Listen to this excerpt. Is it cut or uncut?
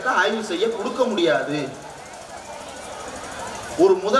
uncut